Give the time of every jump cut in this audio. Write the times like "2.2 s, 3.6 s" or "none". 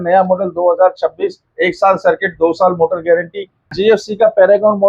3.7 s